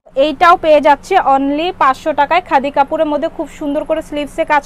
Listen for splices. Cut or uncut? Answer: uncut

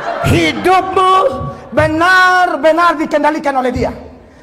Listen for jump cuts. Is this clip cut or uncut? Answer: uncut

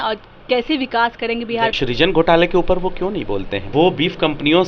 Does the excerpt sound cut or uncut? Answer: cut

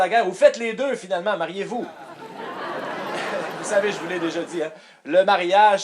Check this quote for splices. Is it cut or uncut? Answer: cut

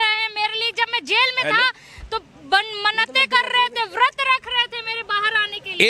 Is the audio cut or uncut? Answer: uncut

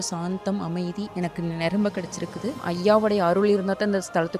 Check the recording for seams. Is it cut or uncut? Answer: cut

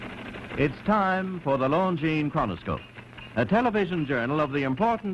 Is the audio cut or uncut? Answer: cut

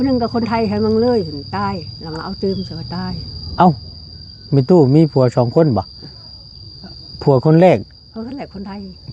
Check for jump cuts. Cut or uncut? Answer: uncut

